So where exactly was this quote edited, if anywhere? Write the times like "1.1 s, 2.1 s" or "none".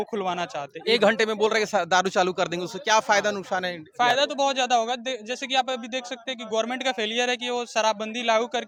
none